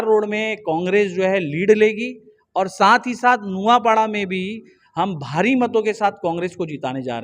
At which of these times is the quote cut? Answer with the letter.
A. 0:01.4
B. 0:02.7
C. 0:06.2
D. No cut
D